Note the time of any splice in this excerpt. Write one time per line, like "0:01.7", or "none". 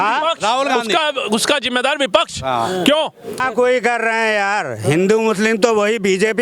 0:03.4